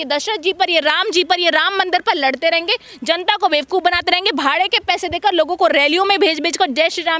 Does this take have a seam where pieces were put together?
no; 0 cuts

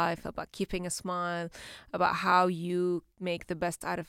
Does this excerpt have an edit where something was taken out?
yes; 1 cut; at 3.1 s

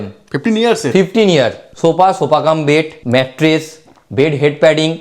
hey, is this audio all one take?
no; 2 cuts; at 1.6 s, 3.0 s

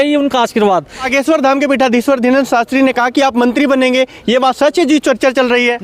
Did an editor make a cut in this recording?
yes; 1 cut; at 1.1 s

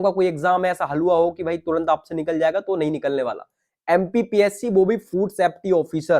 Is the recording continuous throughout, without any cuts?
yes; 0 cuts

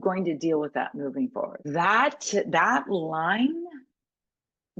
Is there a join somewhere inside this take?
yes; 1 cut; at 1.6 s

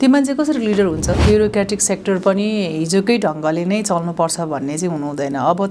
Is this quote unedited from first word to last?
no; 1 cut; at 1.2 s

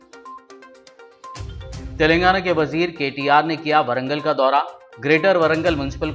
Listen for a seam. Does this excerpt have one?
no; 0 cuts

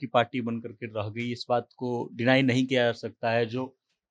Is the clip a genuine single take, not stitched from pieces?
yes; 0 cuts

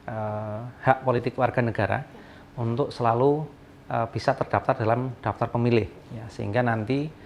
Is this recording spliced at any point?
no; 0 cuts

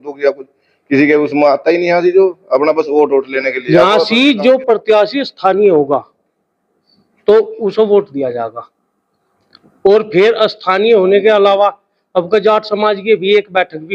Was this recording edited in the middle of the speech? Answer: yes; 1 cut; at 3.6 s

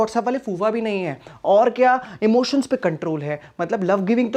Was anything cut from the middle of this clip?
no; 0 cuts

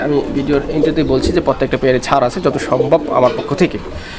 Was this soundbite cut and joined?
no; 0 cuts

